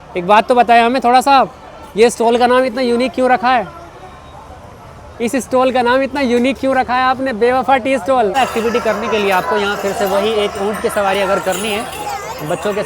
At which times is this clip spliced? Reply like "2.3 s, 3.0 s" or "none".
8.3 s